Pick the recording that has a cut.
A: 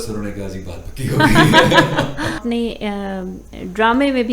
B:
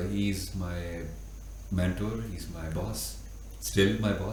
A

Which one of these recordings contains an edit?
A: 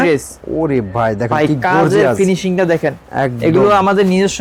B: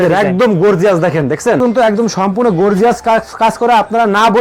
B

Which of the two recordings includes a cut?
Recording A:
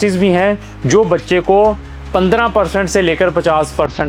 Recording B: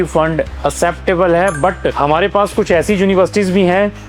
B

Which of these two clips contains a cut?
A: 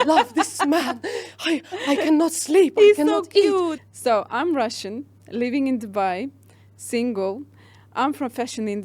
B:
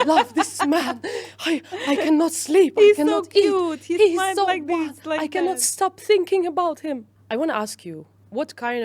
A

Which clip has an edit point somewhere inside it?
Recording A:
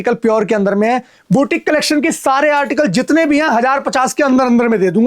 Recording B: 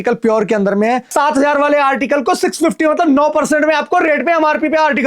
B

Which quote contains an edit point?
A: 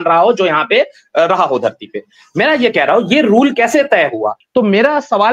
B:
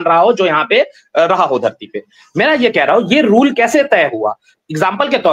A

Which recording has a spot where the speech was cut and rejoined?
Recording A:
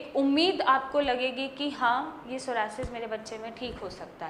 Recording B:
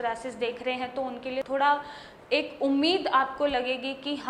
B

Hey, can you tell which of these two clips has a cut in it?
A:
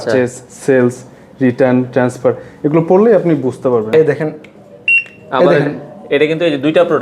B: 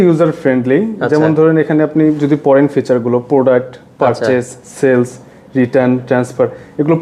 A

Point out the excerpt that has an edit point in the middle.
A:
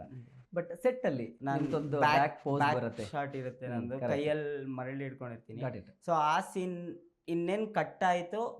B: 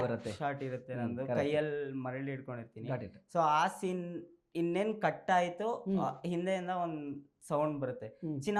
A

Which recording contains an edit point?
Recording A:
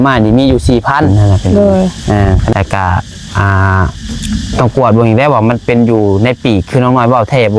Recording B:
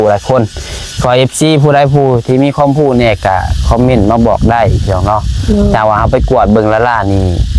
A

